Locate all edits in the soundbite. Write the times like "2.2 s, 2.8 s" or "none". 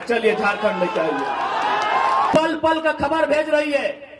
2.3 s